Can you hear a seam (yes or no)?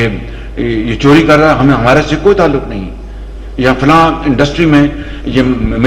no